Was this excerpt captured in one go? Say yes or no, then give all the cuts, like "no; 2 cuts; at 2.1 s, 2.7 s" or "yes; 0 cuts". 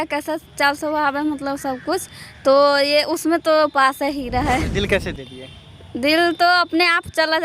no; 1 cut; at 4.7 s